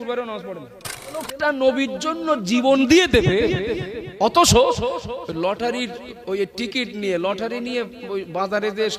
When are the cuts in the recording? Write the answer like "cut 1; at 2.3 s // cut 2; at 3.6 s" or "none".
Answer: cut 1; at 1.3 s